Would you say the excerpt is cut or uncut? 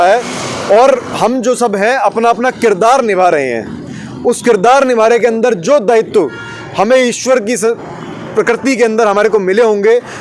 uncut